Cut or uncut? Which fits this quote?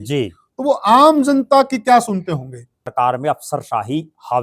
cut